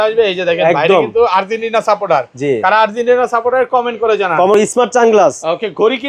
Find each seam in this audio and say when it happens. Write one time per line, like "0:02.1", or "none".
0:04.5